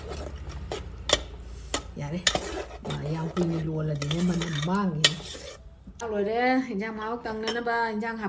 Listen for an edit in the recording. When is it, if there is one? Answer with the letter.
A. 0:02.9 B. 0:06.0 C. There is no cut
B